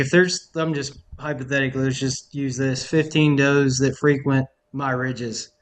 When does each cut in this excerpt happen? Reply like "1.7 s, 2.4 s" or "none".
4.6 s